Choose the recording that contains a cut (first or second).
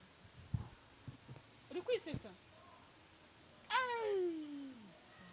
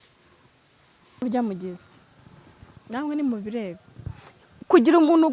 second